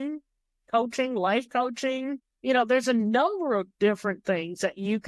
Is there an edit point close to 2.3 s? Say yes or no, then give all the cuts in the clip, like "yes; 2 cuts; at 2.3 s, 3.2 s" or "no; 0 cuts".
yes; 1 cut; at 2.3 s